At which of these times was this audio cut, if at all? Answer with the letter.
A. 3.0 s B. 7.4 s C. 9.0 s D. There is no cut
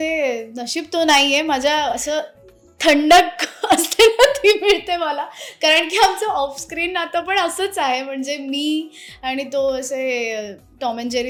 D